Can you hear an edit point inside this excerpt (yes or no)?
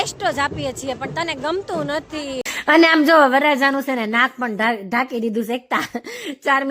yes